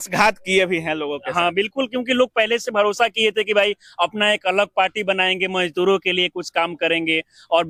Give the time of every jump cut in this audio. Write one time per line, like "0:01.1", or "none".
none